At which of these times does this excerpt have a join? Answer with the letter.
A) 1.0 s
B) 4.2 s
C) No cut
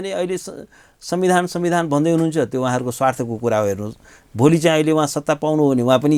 C